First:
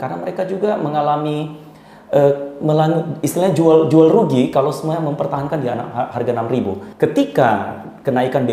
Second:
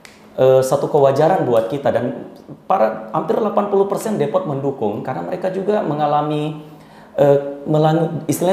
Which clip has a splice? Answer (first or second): first